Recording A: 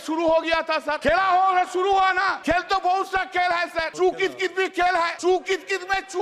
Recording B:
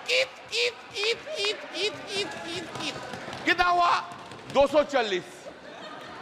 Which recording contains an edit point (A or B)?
A